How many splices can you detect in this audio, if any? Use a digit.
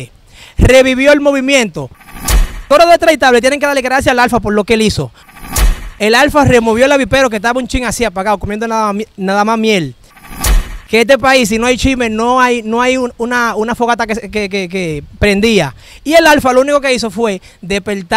3